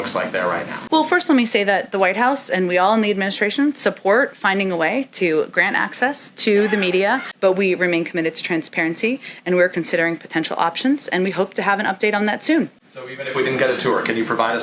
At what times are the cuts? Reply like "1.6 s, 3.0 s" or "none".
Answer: 7.3 s